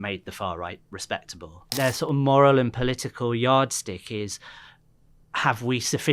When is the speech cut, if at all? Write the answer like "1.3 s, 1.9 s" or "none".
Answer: 1.7 s